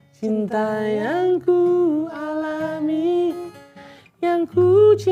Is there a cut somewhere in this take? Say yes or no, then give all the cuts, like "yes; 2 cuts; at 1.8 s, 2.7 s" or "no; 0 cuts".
no; 0 cuts